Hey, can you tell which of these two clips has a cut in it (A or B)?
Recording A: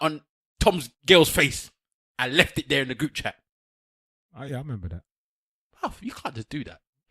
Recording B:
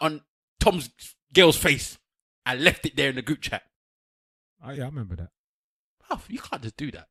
A